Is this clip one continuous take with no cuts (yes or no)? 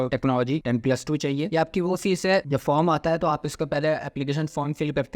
no